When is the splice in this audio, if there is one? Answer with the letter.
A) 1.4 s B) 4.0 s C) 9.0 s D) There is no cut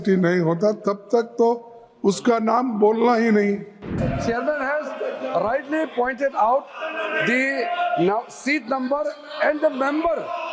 B